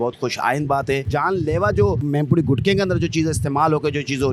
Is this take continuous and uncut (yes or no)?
no